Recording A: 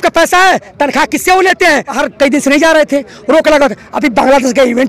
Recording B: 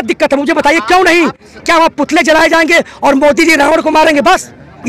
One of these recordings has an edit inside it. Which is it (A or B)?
A